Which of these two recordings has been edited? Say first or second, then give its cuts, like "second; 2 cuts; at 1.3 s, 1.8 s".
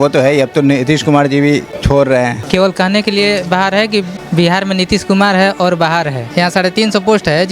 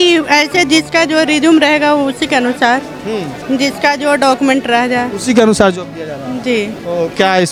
first; 4 cuts; at 1.7 s, 2.4 s, 4.2 s, 6.2 s